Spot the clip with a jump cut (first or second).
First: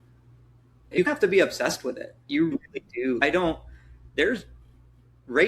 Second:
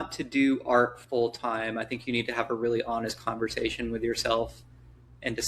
first